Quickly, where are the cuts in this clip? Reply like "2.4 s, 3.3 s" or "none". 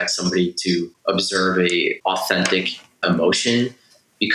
0.9 s, 2.0 s, 3.0 s